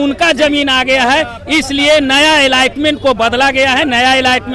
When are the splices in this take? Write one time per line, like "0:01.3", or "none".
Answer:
none

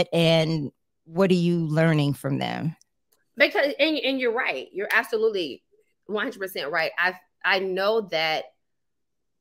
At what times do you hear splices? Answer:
none

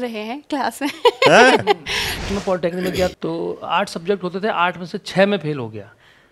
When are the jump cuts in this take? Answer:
0:02.1
0:03.1

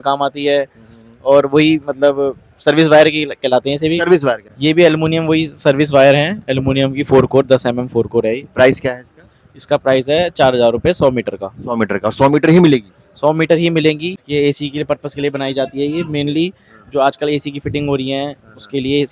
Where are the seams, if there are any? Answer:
0:04.5
0:14.1

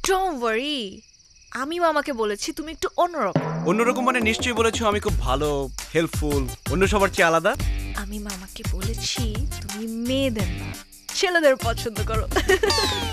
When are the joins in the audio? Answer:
0:07.7

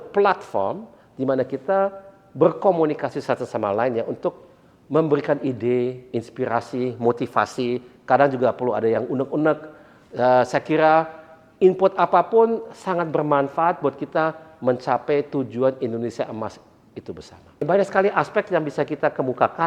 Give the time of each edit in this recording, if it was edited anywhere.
0:17.7

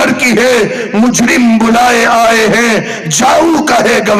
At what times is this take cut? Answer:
none

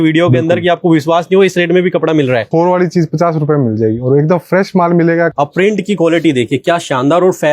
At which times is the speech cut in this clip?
0:02.5
0:05.3

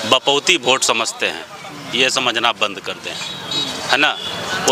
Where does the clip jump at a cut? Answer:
none

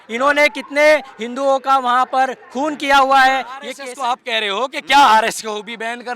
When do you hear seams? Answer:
0:03.7

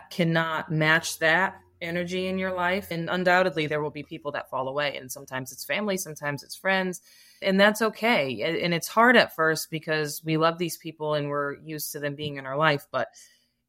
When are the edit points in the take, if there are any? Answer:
0:02.9
0:07.4

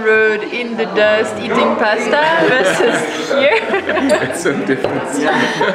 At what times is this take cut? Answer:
none

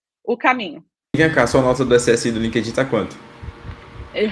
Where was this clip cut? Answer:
0:01.2

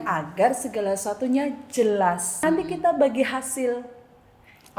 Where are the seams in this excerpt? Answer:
0:02.4

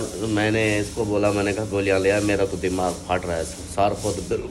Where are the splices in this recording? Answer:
none

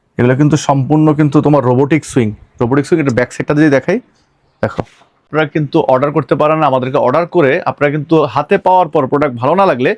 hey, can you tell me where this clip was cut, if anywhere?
0:05.3

